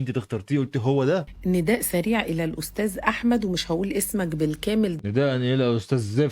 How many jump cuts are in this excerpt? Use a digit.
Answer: 2